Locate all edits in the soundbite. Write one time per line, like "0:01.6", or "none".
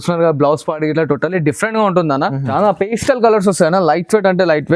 0:02.5